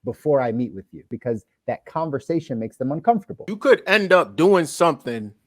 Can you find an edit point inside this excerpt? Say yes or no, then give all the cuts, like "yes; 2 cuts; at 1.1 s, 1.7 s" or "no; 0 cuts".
yes; 2 cuts; at 1.1 s, 3.4 s